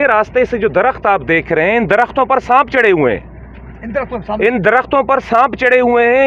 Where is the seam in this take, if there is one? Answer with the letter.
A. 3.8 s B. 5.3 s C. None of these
C